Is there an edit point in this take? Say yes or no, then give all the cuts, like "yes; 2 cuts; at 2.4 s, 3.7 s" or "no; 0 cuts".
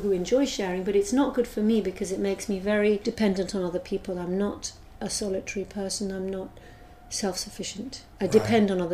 yes; 2 cuts; at 3.0 s, 8.0 s